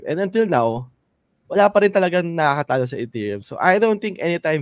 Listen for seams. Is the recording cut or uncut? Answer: uncut